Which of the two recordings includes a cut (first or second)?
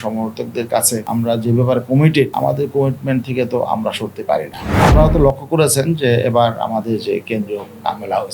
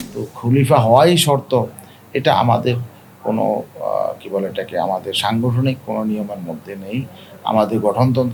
first